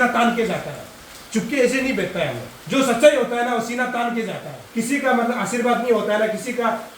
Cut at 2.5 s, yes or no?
yes